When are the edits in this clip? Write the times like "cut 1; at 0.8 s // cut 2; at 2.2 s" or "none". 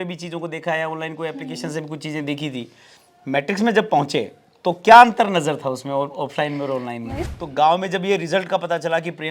cut 1; at 7.3 s